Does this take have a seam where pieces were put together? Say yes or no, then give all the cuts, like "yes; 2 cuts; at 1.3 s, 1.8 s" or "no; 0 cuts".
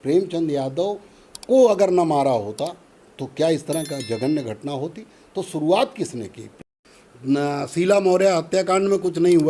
yes; 1 cut; at 6.6 s